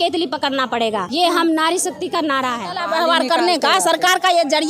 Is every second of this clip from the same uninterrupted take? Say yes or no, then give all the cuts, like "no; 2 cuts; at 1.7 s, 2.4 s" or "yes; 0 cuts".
no; 2 cuts; at 1.1 s, 2.7 s